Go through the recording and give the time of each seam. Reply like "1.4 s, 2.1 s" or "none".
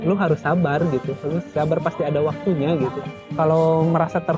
3.1 s